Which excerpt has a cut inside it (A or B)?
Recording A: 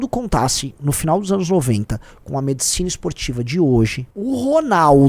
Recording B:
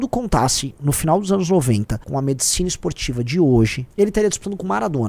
B